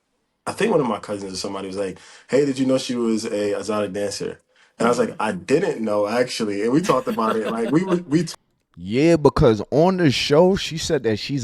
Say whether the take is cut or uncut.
uncut